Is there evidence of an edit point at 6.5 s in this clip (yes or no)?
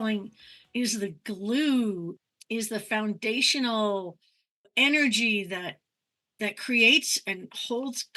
no